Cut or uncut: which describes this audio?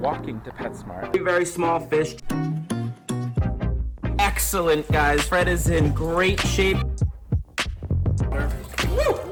uncut